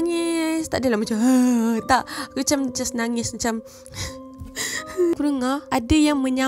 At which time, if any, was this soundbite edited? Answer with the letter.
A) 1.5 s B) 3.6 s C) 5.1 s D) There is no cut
C